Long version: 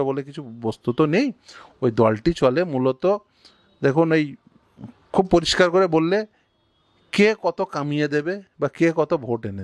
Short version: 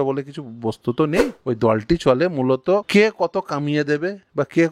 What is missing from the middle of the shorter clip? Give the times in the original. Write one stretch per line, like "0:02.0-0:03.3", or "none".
0:01.3-0:01.7
0:03.2-0:07.1

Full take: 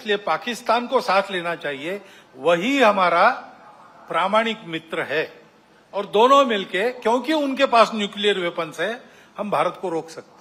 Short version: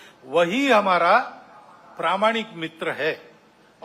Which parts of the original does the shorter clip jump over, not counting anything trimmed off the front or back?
none

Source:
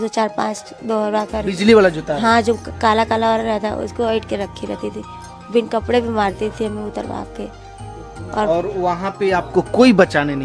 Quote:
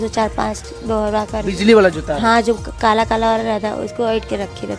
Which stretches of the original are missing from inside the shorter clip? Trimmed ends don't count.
none

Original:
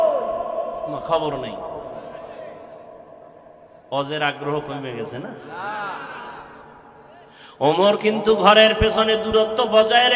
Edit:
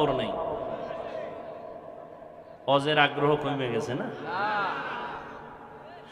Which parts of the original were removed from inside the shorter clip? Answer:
none

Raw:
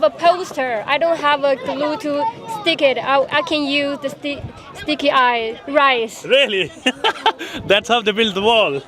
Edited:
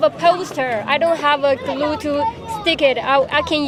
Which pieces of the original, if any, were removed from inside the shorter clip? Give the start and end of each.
none

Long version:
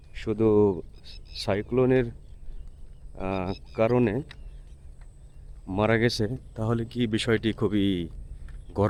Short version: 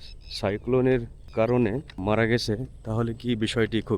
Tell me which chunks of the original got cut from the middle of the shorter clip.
0:02.3-0:03.6
0:04.3-0:05.6

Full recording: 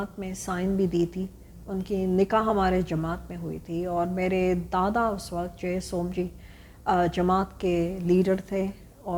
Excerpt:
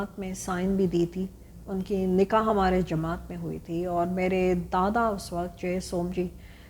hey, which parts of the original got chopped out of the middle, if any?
none

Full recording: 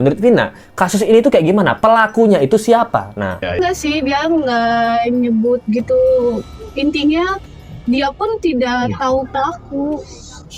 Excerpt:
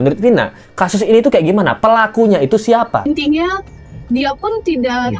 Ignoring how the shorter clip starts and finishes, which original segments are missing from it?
0:03.0-0:06.8

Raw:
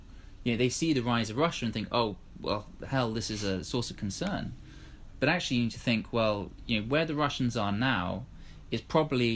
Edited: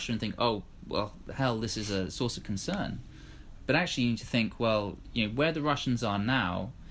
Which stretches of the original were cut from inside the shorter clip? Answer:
none

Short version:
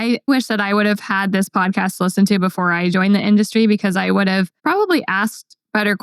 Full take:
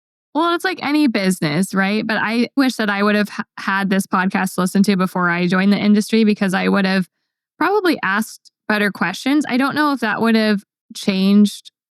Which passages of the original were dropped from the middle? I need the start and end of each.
0:03.4-0:03.7
0:07.1-0:07.5

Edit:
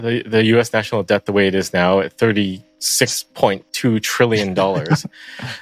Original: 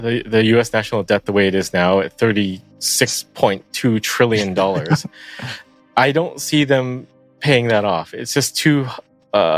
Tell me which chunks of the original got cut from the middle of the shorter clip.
none

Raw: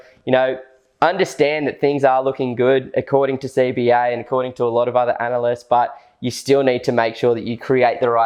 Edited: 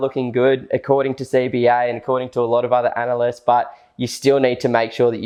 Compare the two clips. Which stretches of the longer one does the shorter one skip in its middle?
none

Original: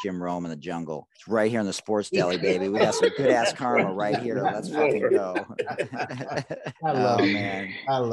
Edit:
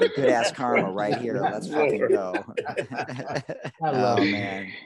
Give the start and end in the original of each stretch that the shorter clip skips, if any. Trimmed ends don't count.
none

